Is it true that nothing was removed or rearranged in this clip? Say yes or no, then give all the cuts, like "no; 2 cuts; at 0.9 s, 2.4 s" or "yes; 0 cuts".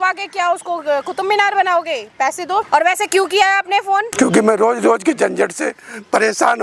no; 2 cuts; at 2.7 s, 4.1 s